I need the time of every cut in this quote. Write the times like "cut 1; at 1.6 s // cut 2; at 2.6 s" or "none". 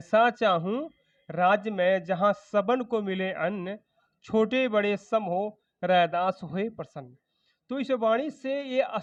none